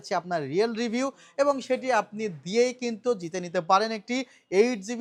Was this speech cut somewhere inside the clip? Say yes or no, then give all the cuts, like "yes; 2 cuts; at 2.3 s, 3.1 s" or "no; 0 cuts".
no; 0 cuts